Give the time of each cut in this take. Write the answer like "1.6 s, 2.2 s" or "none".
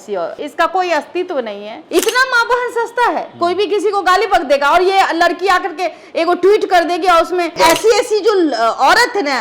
1.8 s, 7.5 s